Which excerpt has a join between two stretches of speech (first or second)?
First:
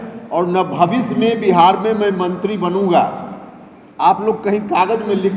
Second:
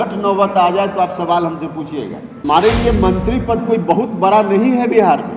second